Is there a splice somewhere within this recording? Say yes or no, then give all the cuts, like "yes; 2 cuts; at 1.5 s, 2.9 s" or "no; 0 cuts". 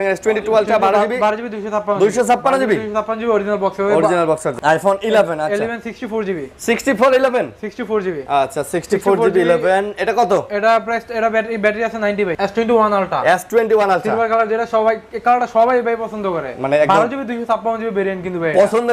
yes; 2 cuts; at 4.5 s, 12.3 s